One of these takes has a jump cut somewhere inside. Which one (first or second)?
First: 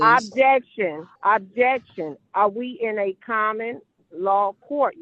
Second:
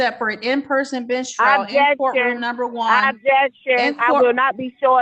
first